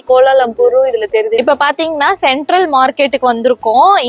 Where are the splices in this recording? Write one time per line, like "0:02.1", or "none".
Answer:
0:01.4